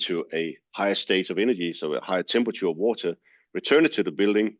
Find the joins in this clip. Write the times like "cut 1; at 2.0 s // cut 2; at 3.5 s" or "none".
none

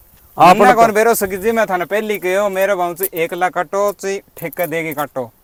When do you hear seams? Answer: none

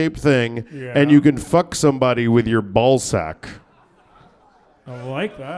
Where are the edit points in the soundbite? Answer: none

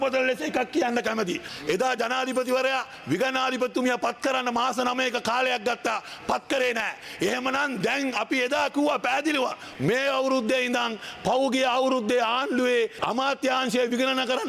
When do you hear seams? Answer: cut 1; at 1.5 s // cut 2; at 9.6 s // cut 3; at 13.0 s

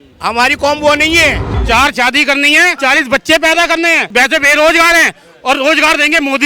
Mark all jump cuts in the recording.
cut 1; at 1.5 s // cut 2; at 2.7 s // cut 3; at 4.0 s

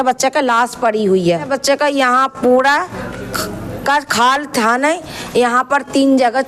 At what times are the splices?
cut 1; at 1.5 s

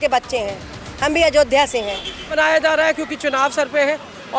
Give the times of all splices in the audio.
cut 1; at 2.3 s

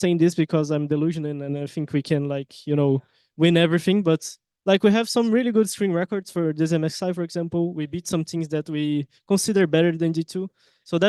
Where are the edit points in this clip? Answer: none

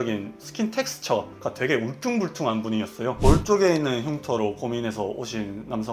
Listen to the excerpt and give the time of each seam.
cut 1; at 3.1 s

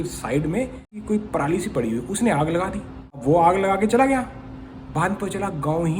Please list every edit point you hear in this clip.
cut 1; at 1.0 s // cut 2; at 3.2 s

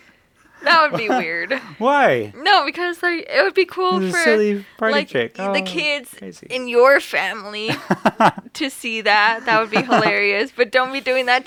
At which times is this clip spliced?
none

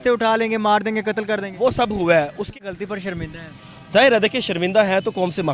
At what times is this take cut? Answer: cut 1; at 2.5 s

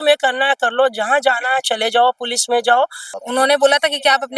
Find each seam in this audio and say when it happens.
cut 1; at 3.1 s

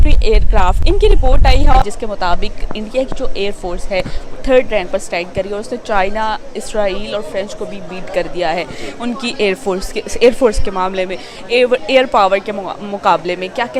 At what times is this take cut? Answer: cut 1; at 1.8 s

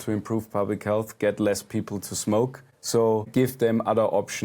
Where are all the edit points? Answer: cut 1; at 3.2 s

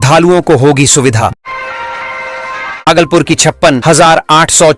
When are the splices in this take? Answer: cut 1; at 1.4 s // cut 2; at 2.8 s

